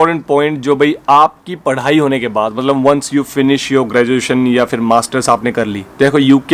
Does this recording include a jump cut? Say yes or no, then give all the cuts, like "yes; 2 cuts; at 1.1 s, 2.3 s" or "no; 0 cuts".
no; 0 cuts